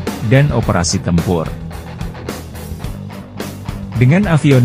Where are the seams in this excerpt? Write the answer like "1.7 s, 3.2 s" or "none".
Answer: none